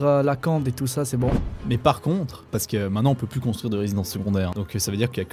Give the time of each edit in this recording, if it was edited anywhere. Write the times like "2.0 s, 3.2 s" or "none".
1.5 s, 2.5 s, 4.5 s